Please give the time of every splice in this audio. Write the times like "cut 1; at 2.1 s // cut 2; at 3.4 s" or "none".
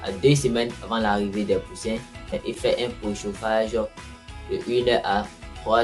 cut 1; at 2.5 s